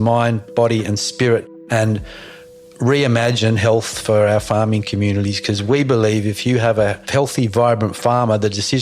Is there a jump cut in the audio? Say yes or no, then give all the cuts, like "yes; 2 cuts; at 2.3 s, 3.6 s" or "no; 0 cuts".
yes; 2 cuts; at 1.6 s, 7.0 s